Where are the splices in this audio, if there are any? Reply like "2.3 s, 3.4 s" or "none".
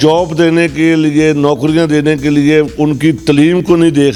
none